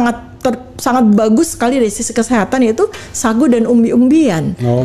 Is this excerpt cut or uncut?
uncut